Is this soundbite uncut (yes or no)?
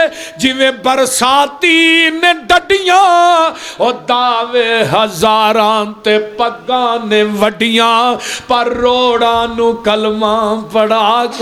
yes